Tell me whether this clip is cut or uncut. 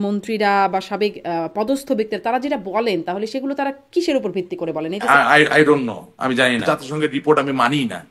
cut